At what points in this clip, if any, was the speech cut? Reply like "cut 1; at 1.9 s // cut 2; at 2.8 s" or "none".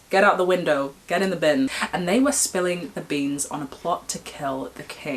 cut 1; at 1.8 s